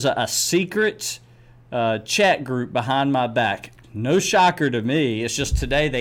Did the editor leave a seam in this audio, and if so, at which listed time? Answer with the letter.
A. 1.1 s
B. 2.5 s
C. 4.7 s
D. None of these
D